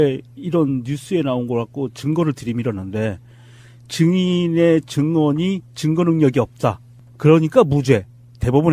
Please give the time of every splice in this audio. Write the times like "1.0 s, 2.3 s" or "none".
6.5 s